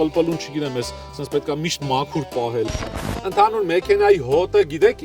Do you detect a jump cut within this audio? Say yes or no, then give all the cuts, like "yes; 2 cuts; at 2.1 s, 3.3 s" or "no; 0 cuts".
yes; 1 cut; at 2.7 s